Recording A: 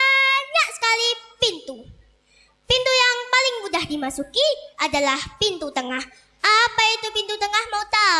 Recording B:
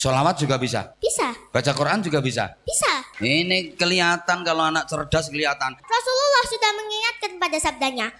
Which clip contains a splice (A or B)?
B